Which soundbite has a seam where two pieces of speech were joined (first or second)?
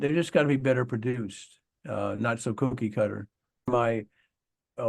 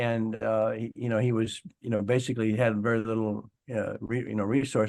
first